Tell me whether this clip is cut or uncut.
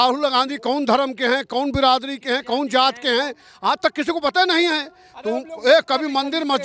uncut